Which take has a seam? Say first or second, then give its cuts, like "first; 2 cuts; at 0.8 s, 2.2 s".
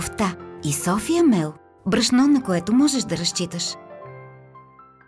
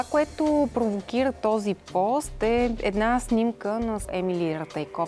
second; 1 cut; at 4.1 s